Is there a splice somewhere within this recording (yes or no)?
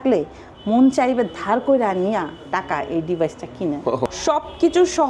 yes